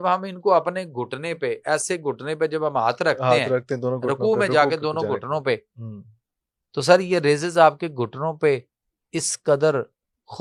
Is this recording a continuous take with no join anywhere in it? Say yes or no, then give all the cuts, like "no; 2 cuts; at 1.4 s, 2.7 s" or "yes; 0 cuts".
yes; 0 cuts